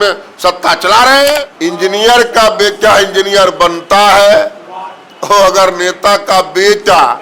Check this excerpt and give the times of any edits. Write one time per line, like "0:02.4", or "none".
0:01.5